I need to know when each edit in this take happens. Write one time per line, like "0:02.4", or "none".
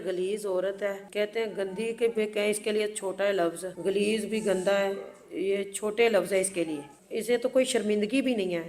none